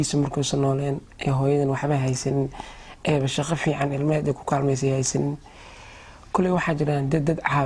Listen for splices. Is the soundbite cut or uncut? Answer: uncut